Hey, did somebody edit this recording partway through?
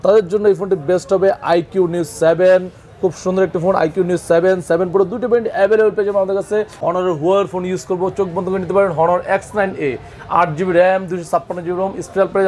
yes; 1 cut; at 6.8 s

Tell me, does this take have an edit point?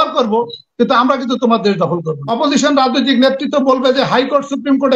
yes; 1 cut; at 2.2 s

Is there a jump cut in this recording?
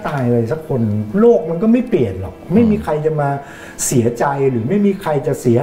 no; 0 cuts

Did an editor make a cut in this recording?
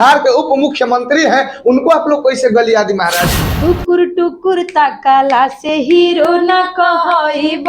yes; 1 cut; at 3.4 s

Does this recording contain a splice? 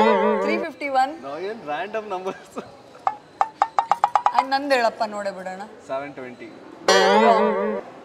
no; 0 cuts

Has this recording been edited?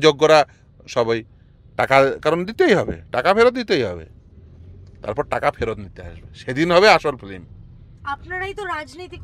no; 0 cuts

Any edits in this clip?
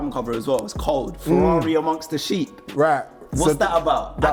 no; 0 cuts

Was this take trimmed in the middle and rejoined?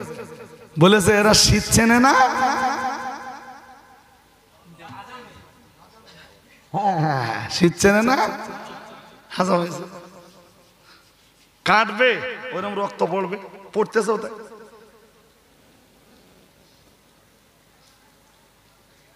no; 0 cuts

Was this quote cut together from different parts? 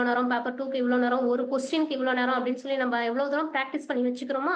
no; 0 cuts

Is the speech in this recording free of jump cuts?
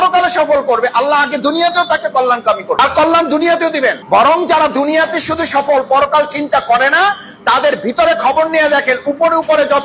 yes; 0 cuts

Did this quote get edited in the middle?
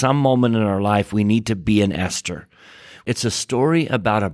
yes; 1 cut; at 3.0 s

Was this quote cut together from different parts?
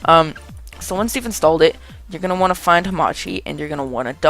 yes; 1 cut; at 1.8 s

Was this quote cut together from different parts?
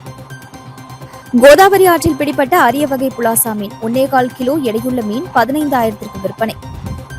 yes; 1 cut; at 0.9 s

